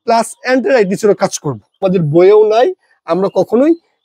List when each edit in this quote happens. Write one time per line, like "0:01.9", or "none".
0:01.8